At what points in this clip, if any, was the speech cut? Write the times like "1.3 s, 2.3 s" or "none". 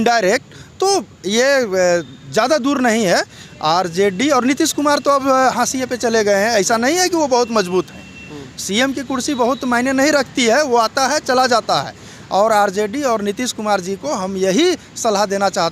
none